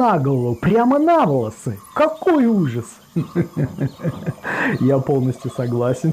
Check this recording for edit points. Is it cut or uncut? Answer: uncut